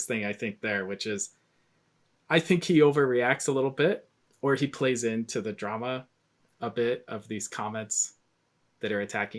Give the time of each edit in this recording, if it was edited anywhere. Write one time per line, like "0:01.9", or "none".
none